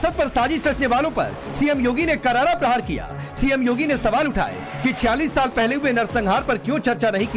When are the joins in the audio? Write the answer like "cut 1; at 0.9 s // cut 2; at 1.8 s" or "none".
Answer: cut 1; at 4.6 s